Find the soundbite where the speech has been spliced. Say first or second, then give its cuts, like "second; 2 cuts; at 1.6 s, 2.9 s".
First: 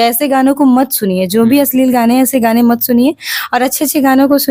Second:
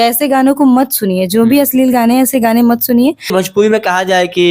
second; 1 cut; at 3.3 s